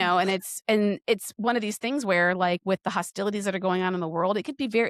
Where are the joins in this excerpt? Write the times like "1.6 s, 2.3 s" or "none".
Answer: none